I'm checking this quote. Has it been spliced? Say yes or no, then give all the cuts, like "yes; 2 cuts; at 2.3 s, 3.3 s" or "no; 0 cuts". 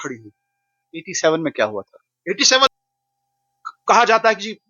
yes; 1 cut; at 2.7 s